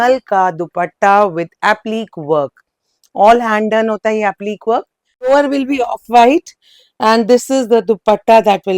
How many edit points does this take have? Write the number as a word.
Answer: one